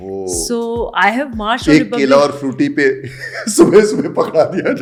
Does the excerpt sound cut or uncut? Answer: uncut